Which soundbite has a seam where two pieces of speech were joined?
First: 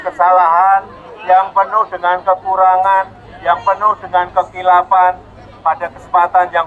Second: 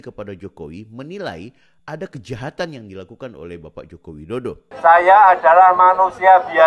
second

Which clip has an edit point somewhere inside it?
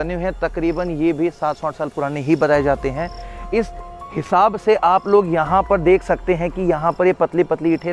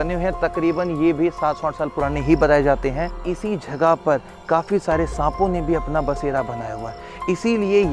second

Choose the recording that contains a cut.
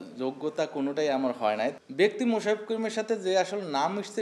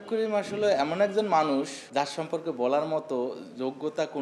first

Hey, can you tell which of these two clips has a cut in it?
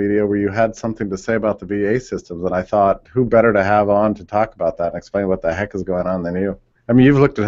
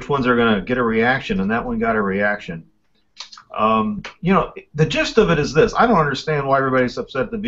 second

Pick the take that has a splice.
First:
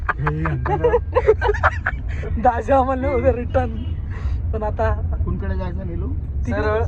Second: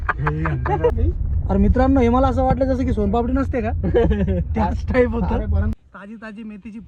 second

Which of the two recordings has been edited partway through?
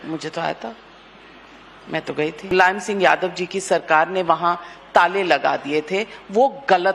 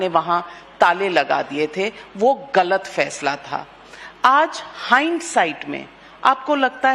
first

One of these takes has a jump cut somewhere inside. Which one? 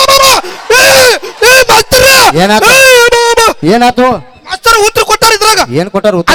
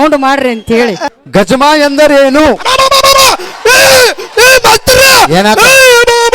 second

